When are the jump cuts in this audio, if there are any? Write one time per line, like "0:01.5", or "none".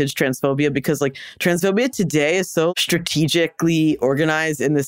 0:02.7